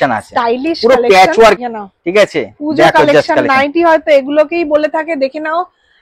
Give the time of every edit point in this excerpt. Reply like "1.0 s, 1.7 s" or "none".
1.6 s

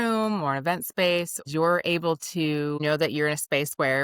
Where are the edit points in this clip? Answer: 1.4 s, 2.8 s

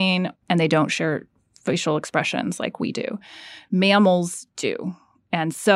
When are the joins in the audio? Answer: none

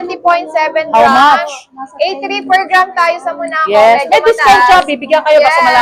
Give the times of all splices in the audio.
none

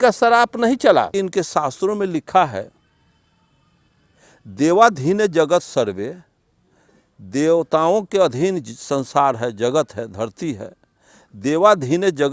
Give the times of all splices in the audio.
1.1 s

